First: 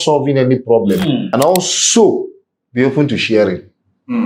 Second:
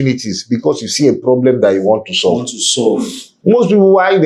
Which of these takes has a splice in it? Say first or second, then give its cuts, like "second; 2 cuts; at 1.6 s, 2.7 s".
first; 1 cut; at 1.3 s